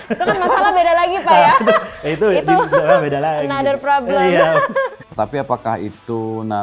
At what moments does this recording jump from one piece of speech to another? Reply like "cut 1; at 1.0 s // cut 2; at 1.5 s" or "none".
cut 1; at 5.0 s